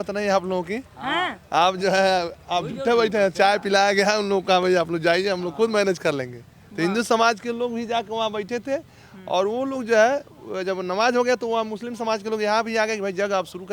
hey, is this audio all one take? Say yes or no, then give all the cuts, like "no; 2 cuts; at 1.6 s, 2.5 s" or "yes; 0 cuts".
yes; 0 cuts